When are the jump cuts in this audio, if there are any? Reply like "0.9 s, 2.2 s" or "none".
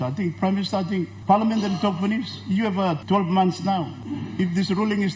1.1 s, 3.0 s, 4.0 s